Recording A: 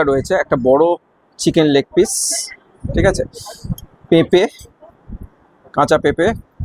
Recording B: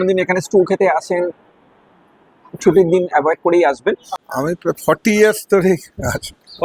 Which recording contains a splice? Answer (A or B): B